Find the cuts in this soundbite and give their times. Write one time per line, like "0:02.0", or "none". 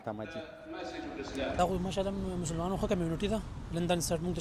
0:01.6